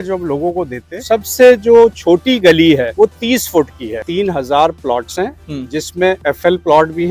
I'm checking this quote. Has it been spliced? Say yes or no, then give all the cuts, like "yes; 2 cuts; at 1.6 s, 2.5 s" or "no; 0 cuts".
yes; 3 cuts; at 1.0 s, 2.9 s, 4.0 s